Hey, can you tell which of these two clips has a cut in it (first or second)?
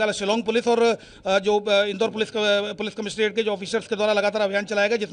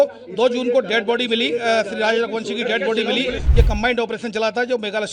second